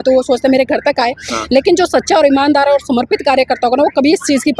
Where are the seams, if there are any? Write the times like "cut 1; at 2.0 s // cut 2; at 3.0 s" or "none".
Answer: none